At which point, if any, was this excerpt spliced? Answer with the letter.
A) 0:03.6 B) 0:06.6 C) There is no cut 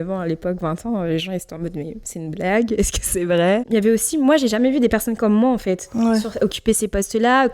A